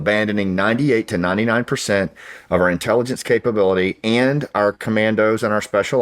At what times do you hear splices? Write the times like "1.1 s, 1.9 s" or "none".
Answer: none